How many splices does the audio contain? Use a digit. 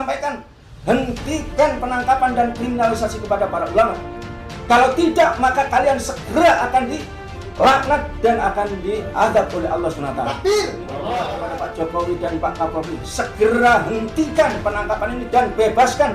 1